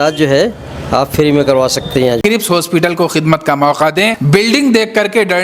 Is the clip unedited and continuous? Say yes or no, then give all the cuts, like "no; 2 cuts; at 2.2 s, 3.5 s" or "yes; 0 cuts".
no; 2 cuts; at 2.2 s, 4.2 s